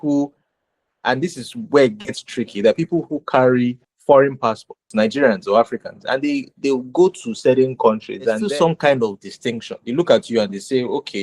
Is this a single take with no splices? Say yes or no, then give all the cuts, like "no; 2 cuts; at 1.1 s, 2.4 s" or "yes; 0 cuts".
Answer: no; 3 cuts; at 3.9 s, 4.8 s, 8.4 s